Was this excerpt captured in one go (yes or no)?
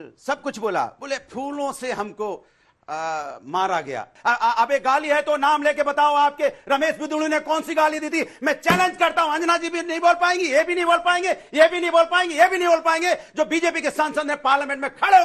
no